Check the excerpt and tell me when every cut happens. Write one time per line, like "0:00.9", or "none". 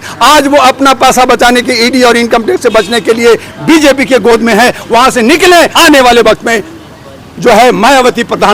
0:05.7